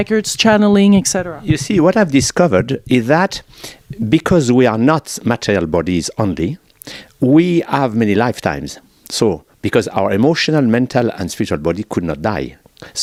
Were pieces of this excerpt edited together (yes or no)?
no